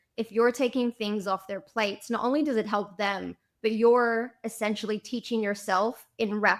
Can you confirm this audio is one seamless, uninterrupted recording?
yes; 0 cuts

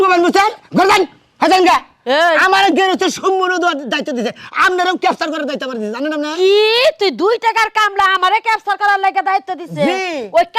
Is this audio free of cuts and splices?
yes; 0 cuts

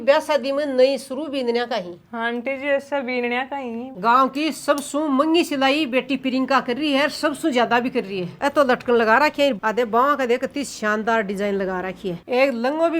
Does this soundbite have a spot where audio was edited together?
yes; 3 cuts; at 3.9 s, 8.4 s, 12.2 s

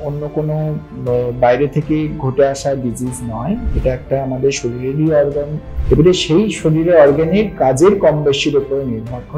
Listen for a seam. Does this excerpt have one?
yes; 1 cut; at 5.7 s

